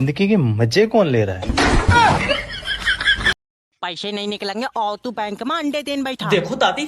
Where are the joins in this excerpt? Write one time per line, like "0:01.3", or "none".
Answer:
0:03.3